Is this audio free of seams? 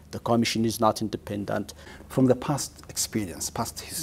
no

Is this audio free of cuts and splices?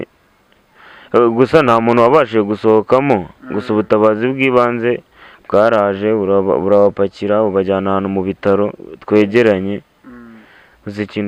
yes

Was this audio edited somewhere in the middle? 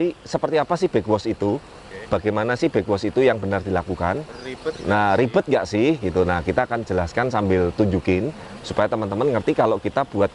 no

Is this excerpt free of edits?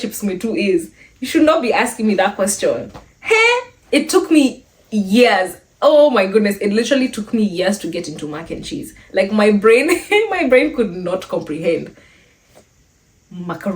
no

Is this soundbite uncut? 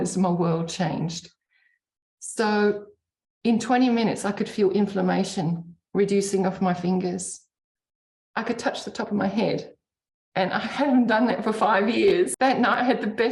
no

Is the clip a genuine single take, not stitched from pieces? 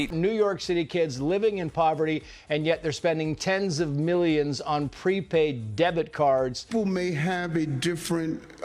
no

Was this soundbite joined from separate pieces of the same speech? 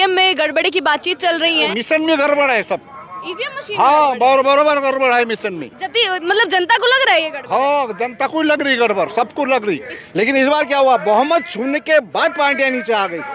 yes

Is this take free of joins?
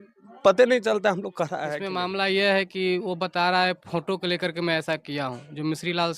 no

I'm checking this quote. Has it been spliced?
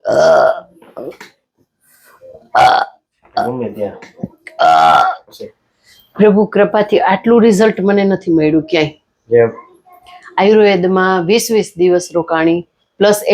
yes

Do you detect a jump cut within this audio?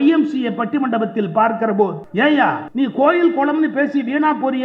yes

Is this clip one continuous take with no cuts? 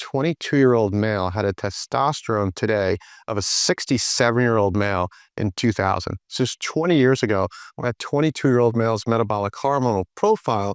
yes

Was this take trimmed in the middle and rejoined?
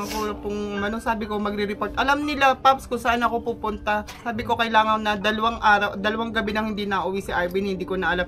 no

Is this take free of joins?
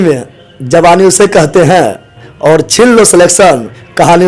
yes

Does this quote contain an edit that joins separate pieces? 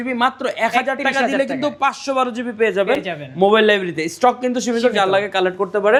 no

